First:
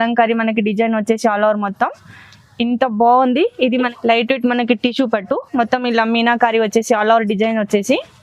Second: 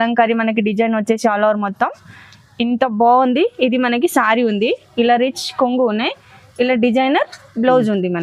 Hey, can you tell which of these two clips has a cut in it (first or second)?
first